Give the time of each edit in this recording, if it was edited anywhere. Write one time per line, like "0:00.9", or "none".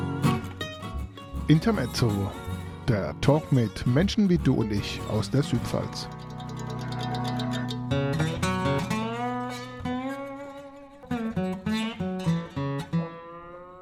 none